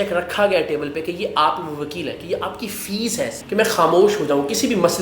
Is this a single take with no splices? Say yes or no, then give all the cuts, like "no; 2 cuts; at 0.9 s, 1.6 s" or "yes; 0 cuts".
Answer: no; 1 cut; at 3.4 s